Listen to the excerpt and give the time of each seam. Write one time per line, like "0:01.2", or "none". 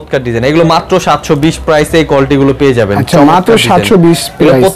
none